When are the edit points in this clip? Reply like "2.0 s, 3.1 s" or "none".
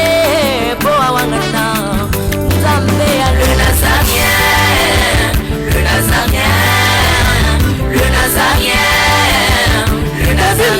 none